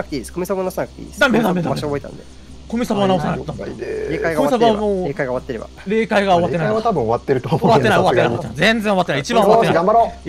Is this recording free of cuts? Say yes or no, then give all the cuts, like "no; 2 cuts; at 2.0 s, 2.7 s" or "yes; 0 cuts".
yes; 0 cuts